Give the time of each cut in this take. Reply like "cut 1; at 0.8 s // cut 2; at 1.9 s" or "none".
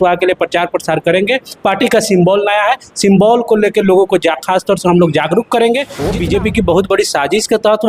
cut 1; at 6.0 s